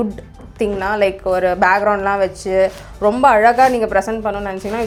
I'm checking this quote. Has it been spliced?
no; 0 cuts

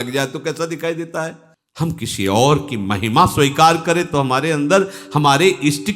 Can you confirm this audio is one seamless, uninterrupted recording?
no; 1 cut; at 1.4 s

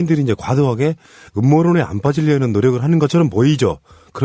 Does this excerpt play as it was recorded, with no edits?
no; 1 cut; at 1.2 s

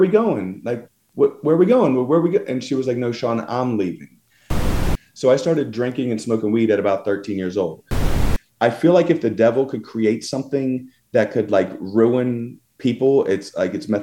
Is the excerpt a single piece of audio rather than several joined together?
no; 2 cuts; at 4.7 s, 8.1 s

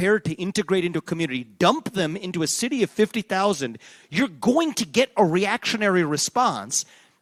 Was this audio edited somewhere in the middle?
no; 0 cuts

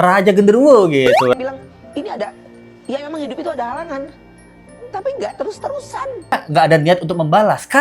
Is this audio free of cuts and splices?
no; 2 cuts; at 1.3 s, 6.3 s

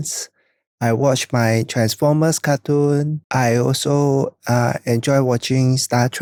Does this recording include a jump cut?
no; 0 cuts

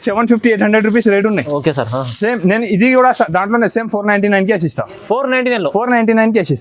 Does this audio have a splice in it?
no; 0 cuts

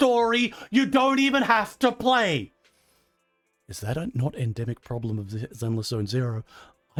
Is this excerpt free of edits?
yes; 0 cuts

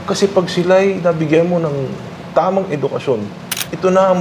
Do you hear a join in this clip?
no; 0 cuts

